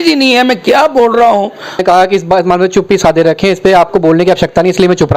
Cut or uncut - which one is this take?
cut